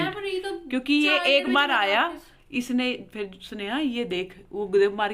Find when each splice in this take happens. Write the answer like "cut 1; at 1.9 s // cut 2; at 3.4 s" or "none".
none